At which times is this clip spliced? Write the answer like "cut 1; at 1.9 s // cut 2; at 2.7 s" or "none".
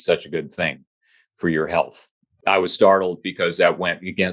cut 1; at 2.3 s